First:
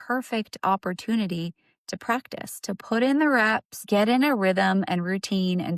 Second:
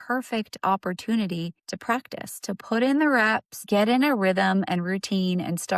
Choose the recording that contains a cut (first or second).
second